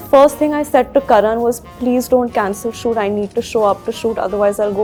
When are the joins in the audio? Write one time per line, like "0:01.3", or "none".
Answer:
none